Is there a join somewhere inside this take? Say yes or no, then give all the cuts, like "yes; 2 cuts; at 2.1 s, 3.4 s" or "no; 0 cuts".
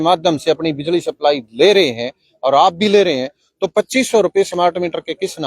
no; 0 cuts